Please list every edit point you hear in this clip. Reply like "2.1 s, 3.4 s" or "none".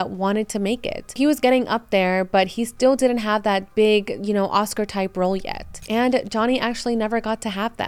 1.2 s